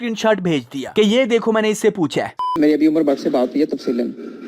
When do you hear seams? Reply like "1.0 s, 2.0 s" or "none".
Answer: 2.4 s